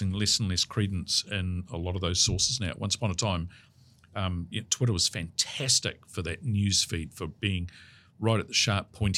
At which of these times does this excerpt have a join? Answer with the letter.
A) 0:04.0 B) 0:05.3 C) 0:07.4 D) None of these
D